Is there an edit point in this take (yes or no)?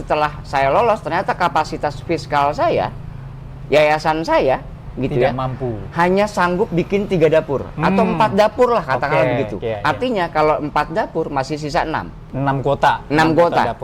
no